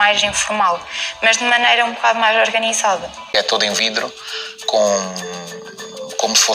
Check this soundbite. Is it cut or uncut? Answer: cut